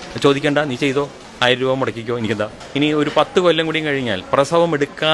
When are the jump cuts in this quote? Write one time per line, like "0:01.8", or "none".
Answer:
0:01.2
0:02.6